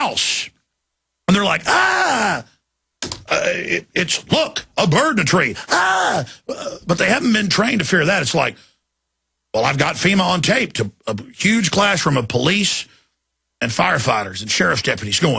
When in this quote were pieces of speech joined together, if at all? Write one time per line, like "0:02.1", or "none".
0:07.2

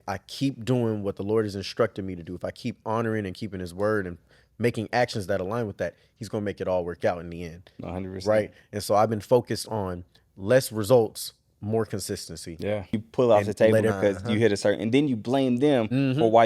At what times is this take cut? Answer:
0:12.9

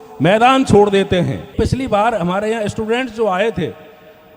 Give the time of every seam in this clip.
0:01.5

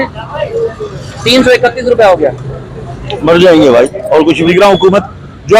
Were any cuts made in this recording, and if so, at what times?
0:04.5

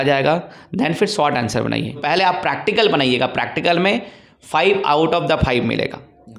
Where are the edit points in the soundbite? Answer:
0:02.0

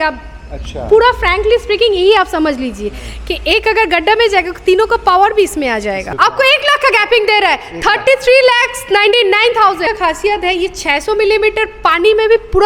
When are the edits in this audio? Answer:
0:06.0
0:09.8

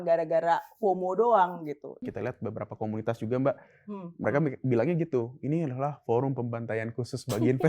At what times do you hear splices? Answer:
0:02.0

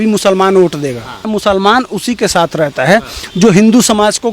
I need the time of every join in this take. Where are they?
0:01.2

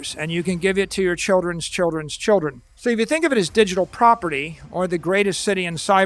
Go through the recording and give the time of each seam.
0:02.6

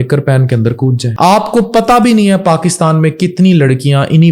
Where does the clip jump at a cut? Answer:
0:01.0

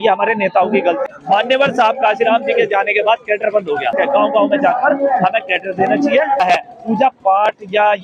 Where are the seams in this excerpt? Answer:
0:01.0
0:03.9
0:06.4

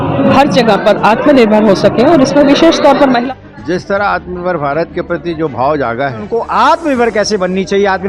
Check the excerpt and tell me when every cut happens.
0:03.2
0:06.3

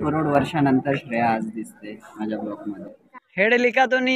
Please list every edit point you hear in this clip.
0:02.9

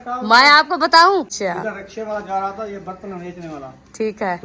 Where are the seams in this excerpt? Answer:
0:01.3

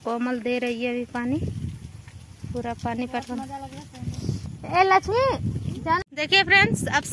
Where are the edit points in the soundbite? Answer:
0:06.0

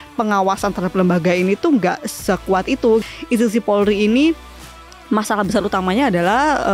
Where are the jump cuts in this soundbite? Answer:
0:03.0

